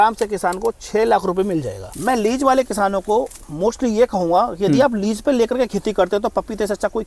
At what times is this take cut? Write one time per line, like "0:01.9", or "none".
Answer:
0:01.8